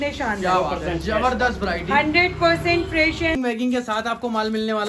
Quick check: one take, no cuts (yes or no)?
no